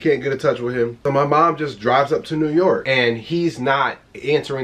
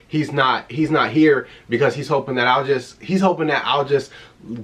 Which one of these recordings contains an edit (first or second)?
first